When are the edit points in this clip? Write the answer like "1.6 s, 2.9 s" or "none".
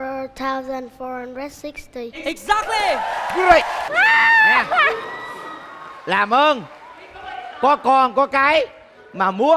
3.8 s

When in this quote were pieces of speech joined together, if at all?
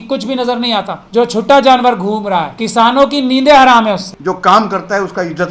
1.0 s, 2.6 s, 4.2 s

